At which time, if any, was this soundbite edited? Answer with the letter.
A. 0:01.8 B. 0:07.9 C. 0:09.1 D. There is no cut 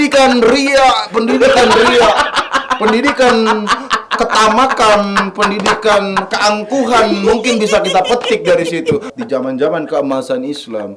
C